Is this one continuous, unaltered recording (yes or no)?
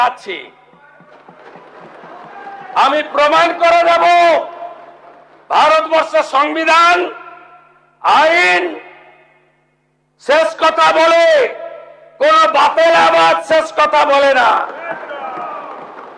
yes